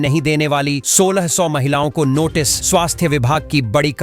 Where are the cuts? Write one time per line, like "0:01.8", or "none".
none